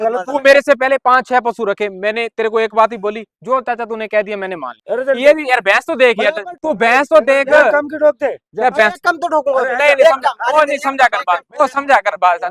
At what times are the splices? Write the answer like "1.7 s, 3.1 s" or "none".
4.7 s, 6.5 s